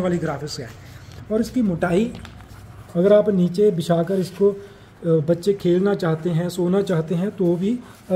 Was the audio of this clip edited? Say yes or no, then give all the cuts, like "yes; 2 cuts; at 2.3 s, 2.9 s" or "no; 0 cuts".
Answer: no; 0 cuts